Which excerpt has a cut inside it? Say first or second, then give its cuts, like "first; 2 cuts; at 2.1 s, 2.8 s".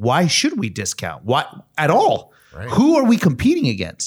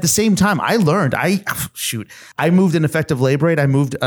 second; 1 cut; at 2.2 s